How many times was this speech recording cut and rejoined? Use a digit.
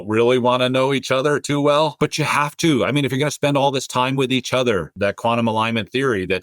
1